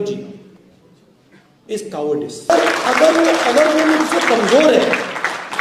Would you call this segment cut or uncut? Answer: cut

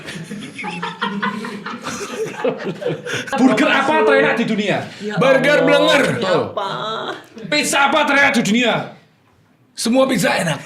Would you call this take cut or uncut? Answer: cut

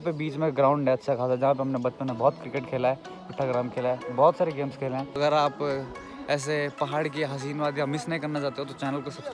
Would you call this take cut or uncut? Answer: cut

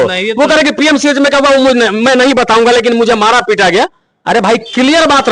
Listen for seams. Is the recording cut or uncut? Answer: uncut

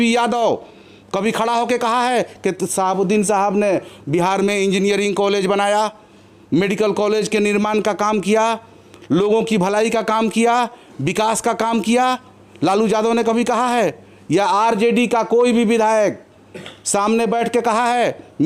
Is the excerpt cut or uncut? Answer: uncut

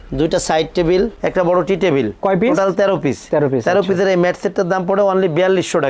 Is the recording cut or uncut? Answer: uncut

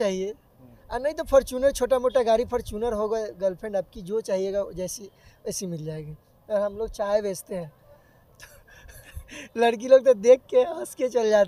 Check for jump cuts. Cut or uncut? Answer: uncut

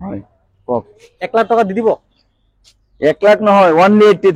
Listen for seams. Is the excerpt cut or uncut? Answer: uncut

